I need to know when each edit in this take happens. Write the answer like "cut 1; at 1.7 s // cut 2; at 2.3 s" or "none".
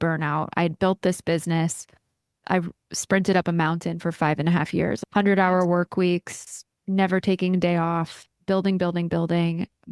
cut 1; at 2.4 s // cut 2; at 5.0 s